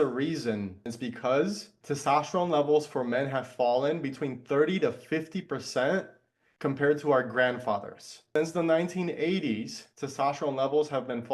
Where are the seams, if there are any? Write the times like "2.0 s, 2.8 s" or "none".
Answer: 0.9 s, 1.7 s, 8.3 s